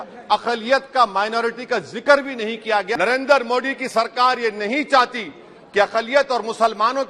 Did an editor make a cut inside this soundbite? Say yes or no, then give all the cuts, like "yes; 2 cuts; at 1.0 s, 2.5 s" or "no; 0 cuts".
yes; 1 cut; at 2.9 s